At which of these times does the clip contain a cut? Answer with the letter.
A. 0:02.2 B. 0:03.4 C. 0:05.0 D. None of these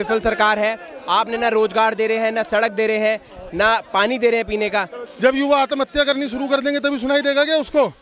C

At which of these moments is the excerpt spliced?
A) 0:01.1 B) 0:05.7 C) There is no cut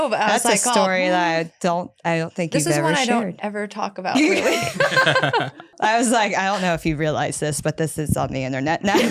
B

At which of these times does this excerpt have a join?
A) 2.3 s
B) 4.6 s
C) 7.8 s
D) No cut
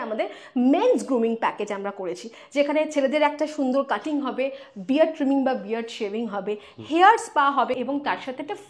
C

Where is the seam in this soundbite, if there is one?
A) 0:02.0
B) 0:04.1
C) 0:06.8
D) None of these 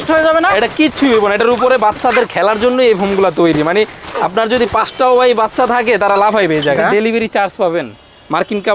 C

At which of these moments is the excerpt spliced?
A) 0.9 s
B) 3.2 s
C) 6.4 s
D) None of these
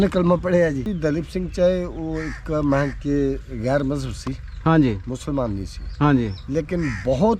A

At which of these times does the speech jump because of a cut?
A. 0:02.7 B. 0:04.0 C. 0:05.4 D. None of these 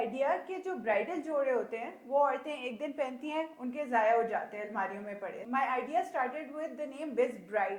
C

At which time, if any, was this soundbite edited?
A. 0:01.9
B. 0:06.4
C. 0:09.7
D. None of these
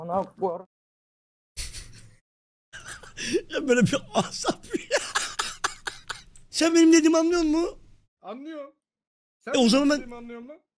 B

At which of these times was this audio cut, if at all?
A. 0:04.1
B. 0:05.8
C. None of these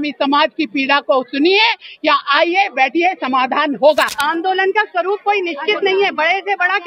A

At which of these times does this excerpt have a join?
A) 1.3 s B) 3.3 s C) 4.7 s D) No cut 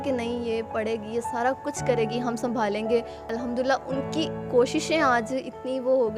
B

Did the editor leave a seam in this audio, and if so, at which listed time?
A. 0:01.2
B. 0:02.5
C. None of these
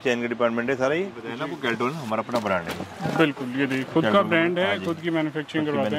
A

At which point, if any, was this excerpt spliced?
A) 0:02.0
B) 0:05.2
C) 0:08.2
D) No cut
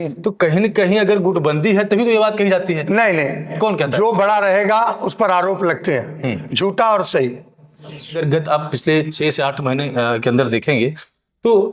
C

